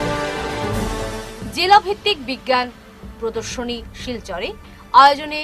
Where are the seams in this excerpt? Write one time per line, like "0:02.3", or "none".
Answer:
0:01.2

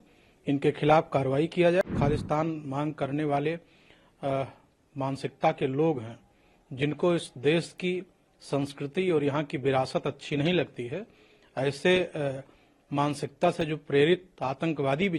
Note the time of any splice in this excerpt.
0:01.8

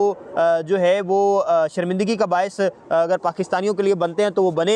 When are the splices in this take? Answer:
none

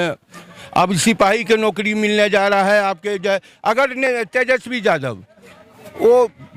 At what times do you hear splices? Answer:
none

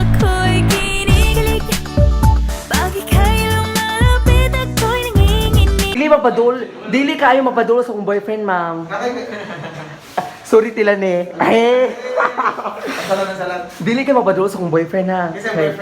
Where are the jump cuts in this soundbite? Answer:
0:06.0

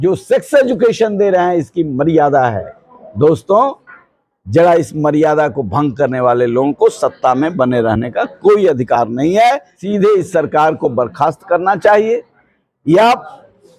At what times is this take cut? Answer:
0:09.7

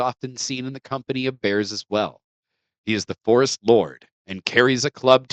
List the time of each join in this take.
none

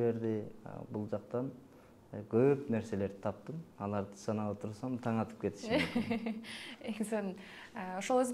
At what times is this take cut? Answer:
none

